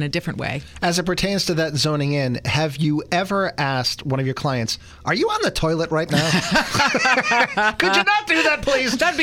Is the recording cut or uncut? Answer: uncut